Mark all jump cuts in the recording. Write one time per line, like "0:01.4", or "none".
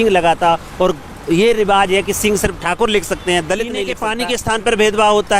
0:04.0